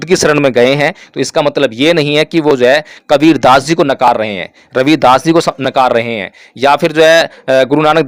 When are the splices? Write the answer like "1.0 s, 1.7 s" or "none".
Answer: none